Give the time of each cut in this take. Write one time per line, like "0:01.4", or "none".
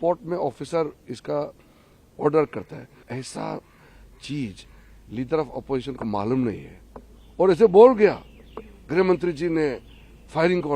0:03.0